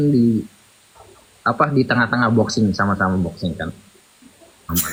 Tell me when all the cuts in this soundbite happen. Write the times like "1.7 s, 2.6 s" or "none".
none